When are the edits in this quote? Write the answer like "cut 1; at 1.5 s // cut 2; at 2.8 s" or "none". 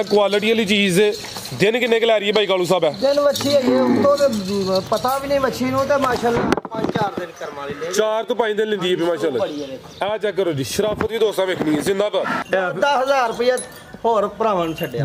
cut 1; at 12.4 s

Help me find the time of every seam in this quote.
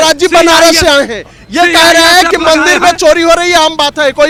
none

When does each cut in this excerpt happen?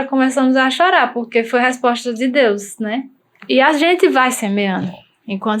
cut 1; at 3.4 s

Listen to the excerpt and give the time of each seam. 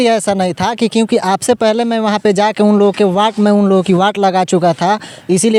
none

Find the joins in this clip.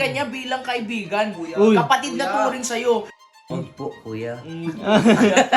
cut 1; at 3.3 s

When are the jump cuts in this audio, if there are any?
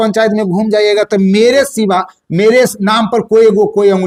none

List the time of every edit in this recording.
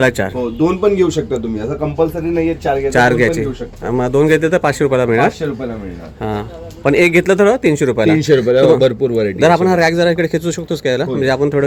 none

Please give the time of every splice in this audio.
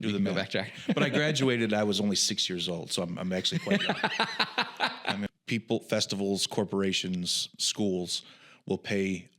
cut 1; at 5.3 s

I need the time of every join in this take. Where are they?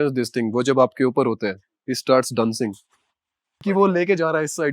cut 1; at 3.8 s

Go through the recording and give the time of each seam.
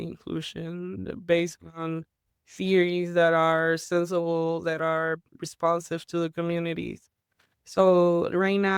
none

